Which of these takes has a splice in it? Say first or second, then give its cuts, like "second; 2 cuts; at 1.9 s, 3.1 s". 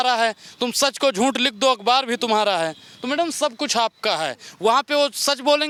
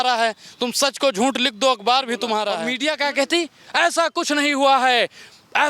second; 1 cut; at 2.7 s